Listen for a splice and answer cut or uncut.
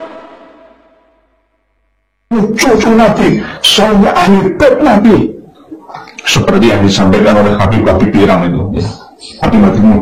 cut